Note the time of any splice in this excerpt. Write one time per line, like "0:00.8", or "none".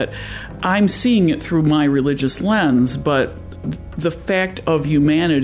none